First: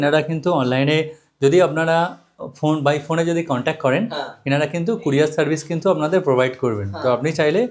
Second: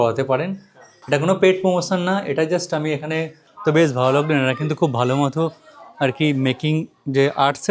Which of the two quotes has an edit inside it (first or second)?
second